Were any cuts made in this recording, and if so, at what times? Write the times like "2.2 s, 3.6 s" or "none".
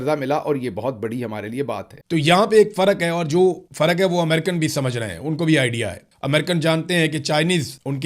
1.9 s